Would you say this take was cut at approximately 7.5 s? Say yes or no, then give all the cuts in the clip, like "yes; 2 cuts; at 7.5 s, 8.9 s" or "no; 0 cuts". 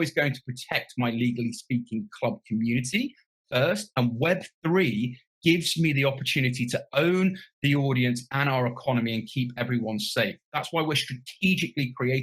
no; 1 cut; at 10.4 s